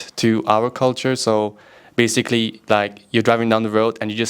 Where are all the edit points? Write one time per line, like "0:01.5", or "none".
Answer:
none